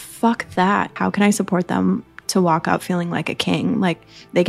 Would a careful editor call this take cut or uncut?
cut